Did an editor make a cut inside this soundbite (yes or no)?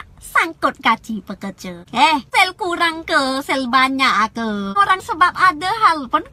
no